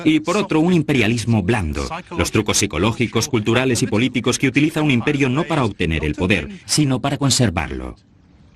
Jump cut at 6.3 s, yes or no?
yes